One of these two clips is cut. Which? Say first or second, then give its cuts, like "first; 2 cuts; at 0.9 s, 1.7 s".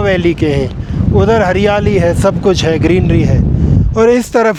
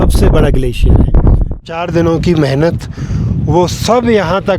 second; 1 cut; at 1.6 s